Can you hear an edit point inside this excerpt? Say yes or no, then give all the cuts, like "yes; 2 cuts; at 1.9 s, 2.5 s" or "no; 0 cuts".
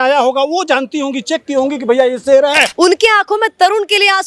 yes; 1 cut; at 2.7 s